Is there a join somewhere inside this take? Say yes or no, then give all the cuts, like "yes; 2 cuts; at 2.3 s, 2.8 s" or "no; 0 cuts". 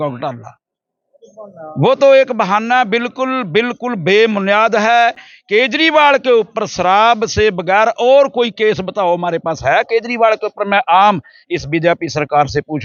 no; 0 cuts